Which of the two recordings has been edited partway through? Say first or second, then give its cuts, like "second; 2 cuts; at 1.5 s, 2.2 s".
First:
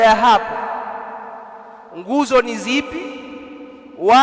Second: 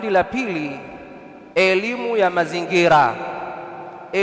second; 1 cut; at 1.6 s